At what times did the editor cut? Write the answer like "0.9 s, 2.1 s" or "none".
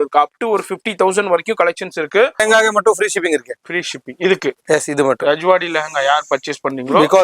2.4 s